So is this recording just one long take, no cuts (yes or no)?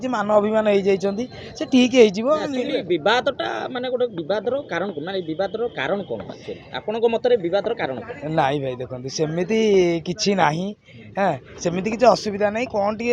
yes